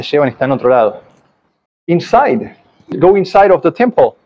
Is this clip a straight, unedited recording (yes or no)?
yes